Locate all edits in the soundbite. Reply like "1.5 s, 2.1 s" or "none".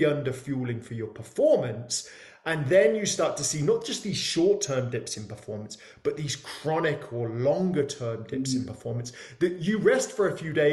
none